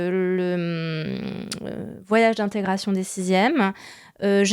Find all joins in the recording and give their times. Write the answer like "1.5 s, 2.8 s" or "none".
none